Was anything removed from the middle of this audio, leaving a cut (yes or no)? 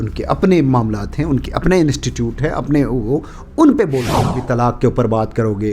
yes